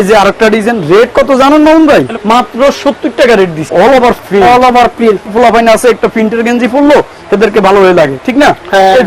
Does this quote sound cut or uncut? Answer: cut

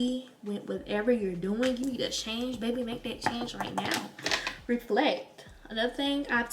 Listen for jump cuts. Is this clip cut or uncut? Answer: uncut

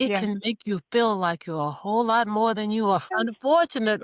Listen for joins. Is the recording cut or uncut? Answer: cut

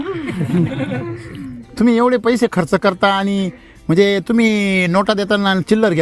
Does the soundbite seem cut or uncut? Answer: uncut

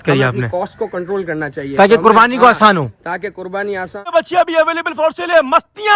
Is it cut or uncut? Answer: cut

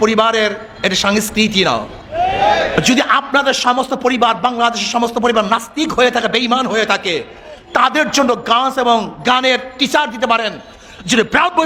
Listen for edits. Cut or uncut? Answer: uncut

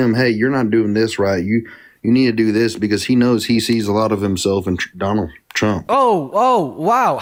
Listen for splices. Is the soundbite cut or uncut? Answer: uncut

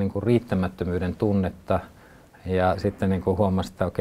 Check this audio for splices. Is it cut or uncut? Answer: cut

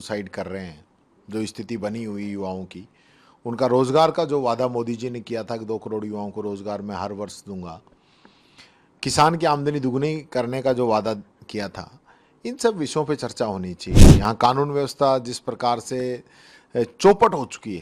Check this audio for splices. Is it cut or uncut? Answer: uncut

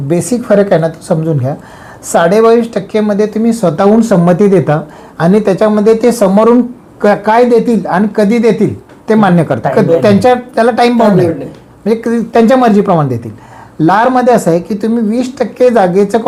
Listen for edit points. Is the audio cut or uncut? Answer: uncut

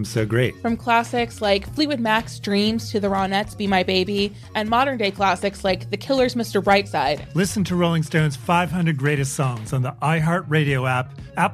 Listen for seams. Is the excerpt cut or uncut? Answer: uncut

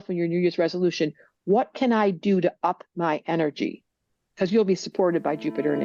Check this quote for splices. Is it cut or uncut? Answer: uncut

